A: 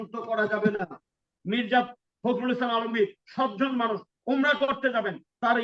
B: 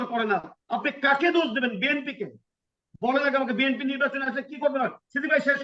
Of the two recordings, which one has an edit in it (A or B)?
A